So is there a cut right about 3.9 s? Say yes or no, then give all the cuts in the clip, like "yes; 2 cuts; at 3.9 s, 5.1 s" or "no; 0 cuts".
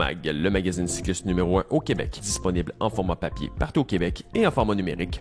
no; 1 cut; at 2.2 s